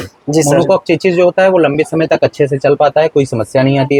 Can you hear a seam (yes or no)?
no